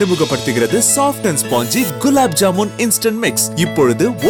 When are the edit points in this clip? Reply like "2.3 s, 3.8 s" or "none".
none